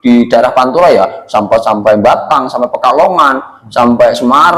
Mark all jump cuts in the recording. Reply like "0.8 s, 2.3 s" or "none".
none